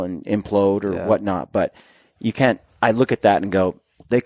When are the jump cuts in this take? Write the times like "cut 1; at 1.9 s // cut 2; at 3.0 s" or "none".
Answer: none

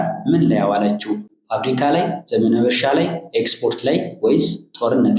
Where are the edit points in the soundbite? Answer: none

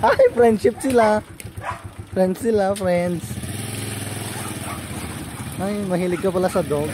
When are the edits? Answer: none

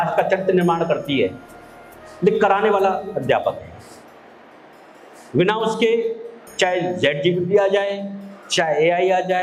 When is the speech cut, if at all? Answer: none

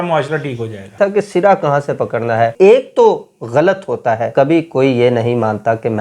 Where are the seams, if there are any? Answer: cut 1; at 0.9 s // cut 2; at 2.5 s // cut 3; at 4.3 s

